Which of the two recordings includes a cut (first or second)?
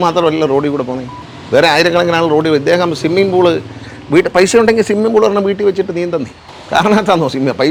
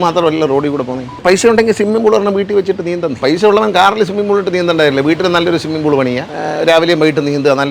second